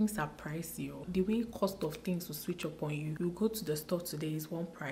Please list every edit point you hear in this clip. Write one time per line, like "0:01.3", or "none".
0:01.0
0:03.1

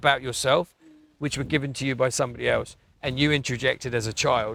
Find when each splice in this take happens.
none

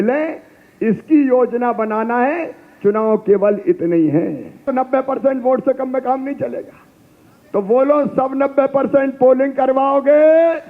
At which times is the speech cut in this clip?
0:04.7

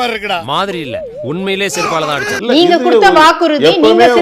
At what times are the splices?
0:02.4

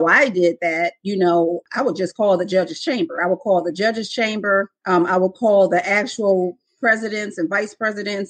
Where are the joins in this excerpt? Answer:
0:01.6
0:04.8

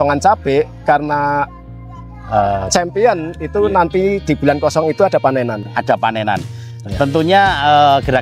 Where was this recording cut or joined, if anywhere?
none

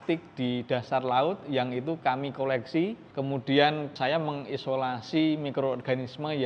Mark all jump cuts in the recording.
0:03.0
0:03.9

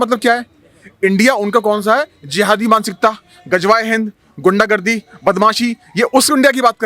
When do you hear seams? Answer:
none

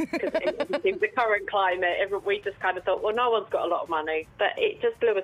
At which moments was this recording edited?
0:04.3

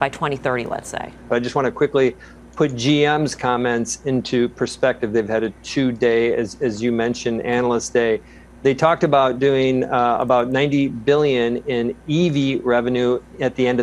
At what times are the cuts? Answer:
0:01.3

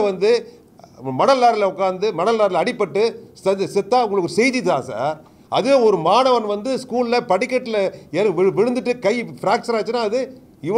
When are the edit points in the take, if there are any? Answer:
none

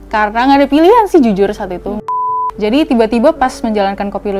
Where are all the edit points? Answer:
0:02.2

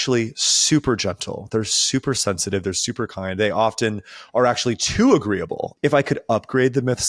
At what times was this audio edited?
0:05.6

